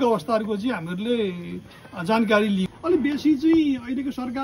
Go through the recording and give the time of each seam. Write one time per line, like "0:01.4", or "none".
none